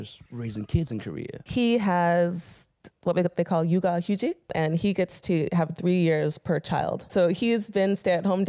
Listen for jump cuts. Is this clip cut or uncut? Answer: cut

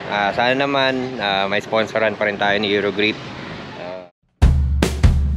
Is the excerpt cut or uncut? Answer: cut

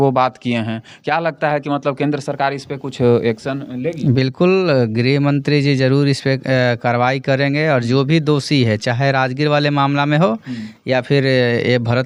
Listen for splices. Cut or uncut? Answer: uncut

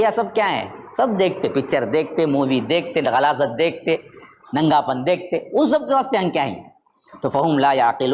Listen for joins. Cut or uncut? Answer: uncut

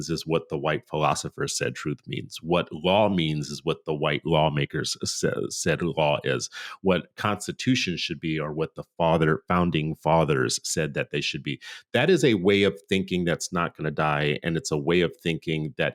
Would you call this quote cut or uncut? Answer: uncut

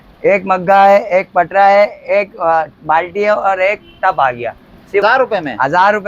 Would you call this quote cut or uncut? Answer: cut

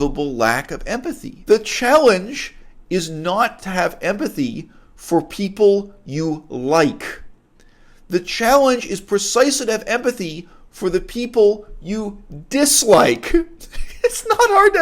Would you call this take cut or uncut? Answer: cut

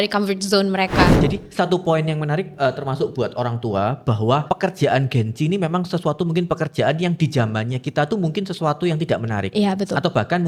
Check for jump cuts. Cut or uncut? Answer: cut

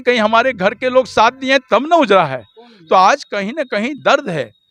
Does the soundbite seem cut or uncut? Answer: uncut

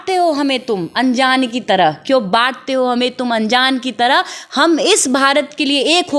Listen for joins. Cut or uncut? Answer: uncut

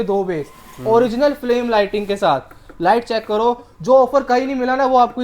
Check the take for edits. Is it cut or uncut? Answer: uncut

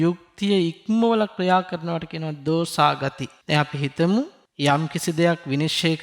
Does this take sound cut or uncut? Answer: cut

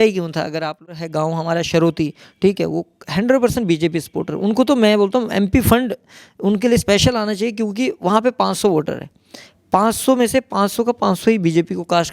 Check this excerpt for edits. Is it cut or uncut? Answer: cut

